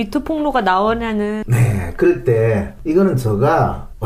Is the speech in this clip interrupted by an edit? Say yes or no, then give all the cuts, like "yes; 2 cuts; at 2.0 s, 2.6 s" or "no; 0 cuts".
no; 0 cuts